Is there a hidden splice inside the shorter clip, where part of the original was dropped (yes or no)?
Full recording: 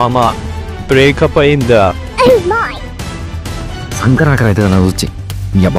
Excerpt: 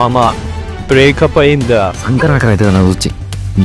yes